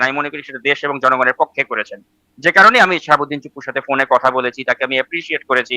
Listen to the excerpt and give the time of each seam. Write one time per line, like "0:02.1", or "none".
none